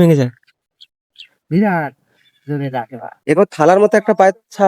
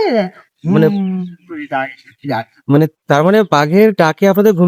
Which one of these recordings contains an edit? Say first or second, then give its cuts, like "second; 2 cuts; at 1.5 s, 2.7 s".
first; 1 cut; at 3.1 s